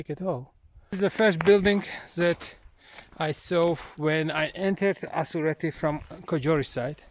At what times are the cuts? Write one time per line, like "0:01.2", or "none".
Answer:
0:00.9